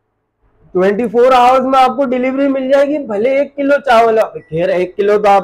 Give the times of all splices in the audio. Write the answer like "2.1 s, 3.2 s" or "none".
none